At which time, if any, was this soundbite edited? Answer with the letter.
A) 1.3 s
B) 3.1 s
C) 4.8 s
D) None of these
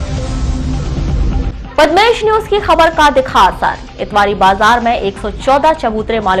D